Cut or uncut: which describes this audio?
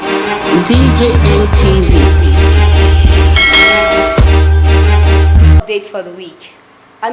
cut